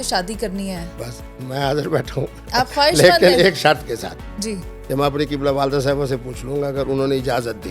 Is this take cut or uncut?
uncut